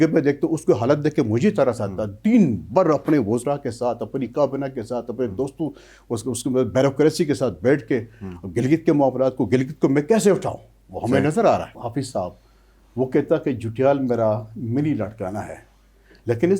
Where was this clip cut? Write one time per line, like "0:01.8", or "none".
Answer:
0:11.7